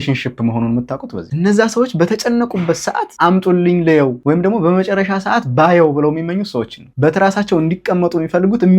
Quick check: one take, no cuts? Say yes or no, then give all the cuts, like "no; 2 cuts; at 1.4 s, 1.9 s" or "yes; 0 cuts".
no; 1 cut; at 3.1 s